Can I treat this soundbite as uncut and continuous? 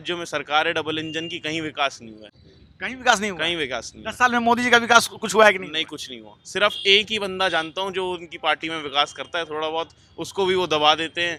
yes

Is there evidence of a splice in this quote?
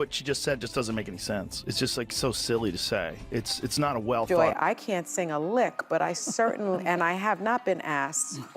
yes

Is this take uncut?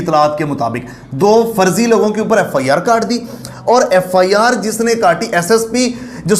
yes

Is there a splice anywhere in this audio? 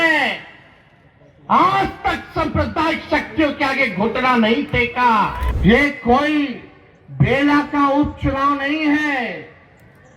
yes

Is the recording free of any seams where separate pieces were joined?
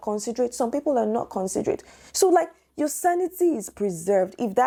yes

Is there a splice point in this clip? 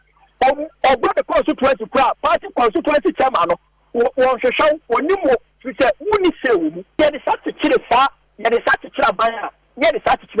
yes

